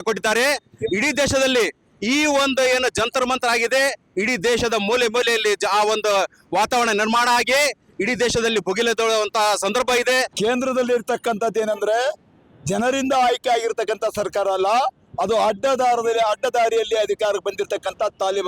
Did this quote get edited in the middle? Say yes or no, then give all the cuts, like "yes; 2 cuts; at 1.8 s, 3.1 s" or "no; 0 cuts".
yes; 1 cut; at 10.3 s